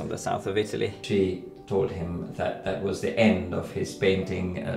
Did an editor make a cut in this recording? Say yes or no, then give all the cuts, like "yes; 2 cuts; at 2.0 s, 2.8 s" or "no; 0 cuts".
yes; 1 cut; at 1.0 s